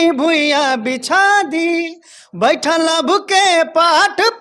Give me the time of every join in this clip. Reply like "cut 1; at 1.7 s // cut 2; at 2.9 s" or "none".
none